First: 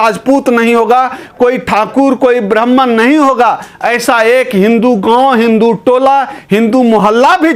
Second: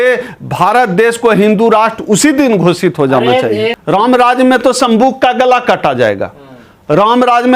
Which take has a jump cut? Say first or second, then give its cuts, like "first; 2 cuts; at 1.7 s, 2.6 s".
second; 1 cut; at 3.8 s